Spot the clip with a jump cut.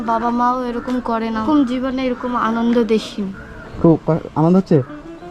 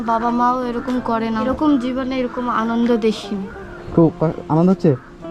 first; 1 cut; at 1.4 s

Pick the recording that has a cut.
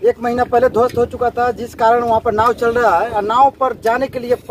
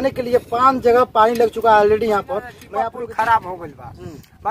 second; 1 cut; at 2.6 s

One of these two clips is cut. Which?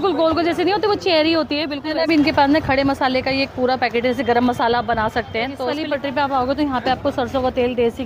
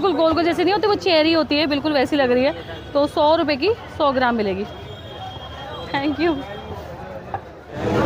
first; 2 cuts; at 1.8 s, 5.7 s

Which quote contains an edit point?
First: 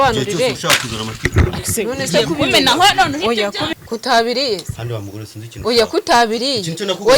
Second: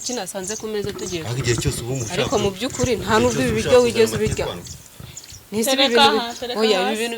first; 1 cut; at 3.7 s

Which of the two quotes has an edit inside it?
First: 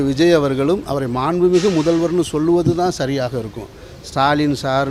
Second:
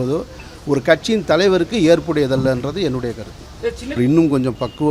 second; 1 cut; at 4.0 s

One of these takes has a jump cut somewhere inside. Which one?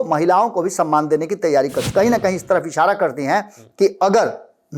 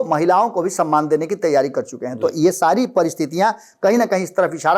first; 1 cut; at 1.8 s

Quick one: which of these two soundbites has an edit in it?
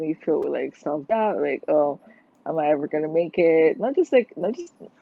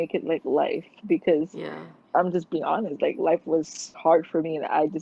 second; 1 cut; at 3.9 s

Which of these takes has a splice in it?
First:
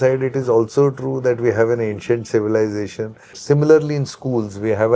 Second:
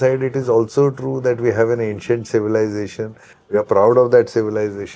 first; 1 cut; at 3.4 s

